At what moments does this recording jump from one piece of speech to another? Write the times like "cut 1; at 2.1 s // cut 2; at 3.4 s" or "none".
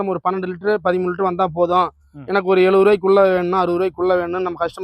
none